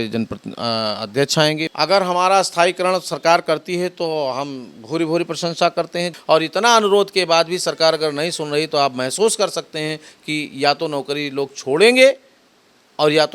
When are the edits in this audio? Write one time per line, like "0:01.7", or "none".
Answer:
0:01.7
0:06.1